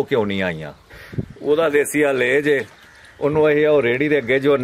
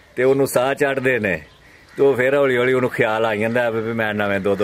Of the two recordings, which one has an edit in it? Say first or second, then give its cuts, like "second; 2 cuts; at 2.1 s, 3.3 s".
first; 1 cut; at 1.0 s